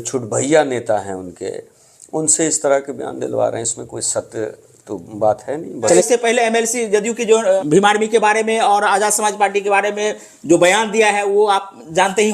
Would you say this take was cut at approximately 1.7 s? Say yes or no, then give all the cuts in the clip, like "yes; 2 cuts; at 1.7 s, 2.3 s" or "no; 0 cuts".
no; 2 cuts; at 6.0 s, 7.6 s